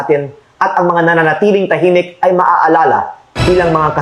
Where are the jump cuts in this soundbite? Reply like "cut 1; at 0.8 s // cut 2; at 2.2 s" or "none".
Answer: none